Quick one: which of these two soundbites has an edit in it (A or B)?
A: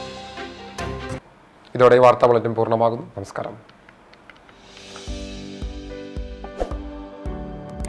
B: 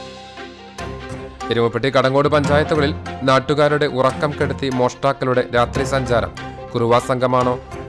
B